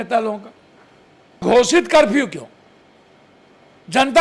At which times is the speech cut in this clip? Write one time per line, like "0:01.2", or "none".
0:01.4